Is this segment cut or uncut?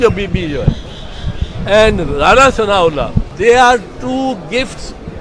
cut